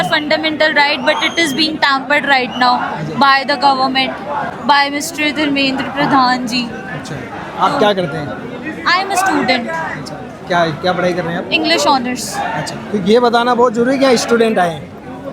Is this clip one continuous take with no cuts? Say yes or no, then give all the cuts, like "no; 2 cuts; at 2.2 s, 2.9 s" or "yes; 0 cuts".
yes; 0 cuts